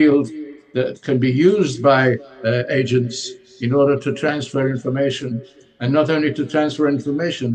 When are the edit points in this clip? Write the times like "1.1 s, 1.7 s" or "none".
none

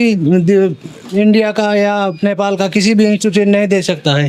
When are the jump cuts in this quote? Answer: none

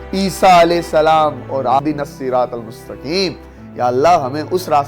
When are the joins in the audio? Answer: 1.8 s

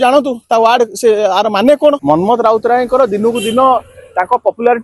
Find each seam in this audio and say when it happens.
2.0 s

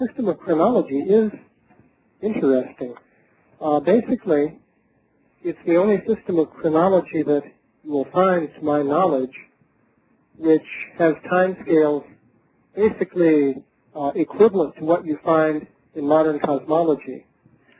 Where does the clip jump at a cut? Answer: none

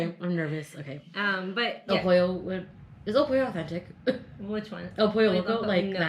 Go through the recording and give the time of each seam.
1.8 s

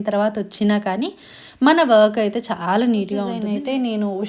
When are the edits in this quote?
3.4 s

